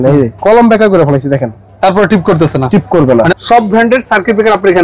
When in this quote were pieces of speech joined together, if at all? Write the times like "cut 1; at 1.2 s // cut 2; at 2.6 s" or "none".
cut 1; at 3.4 s